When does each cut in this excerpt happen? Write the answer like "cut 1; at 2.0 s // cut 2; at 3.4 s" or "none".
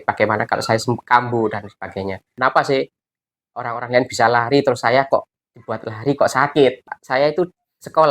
cut 1; at 2.3 s // cut 2; at 6.9 s